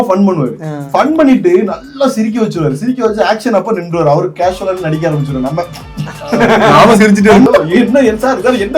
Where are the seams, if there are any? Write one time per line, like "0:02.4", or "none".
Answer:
0:07.5